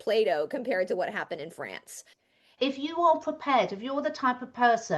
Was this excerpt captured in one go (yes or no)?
no